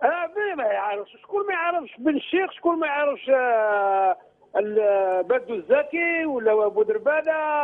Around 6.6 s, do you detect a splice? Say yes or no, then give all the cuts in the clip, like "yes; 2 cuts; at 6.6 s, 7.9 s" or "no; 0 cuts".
yes; 1 cut; at 6.6 s